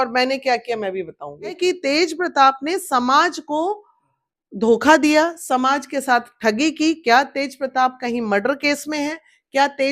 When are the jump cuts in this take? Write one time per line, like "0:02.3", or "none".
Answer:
0:01.6